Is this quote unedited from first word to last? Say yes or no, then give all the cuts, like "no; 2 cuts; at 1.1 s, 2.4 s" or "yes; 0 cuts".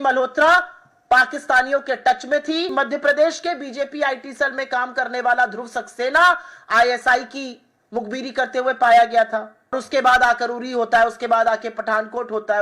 no; 2 cuts; at 2.7 s, 9.7 s